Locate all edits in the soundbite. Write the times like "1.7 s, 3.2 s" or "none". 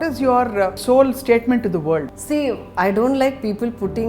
0.8 s, 2.1 s